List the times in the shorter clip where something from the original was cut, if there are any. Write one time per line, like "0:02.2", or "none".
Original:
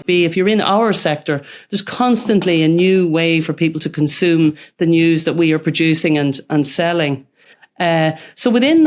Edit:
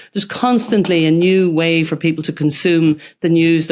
none